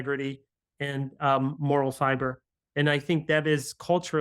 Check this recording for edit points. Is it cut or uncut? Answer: uncut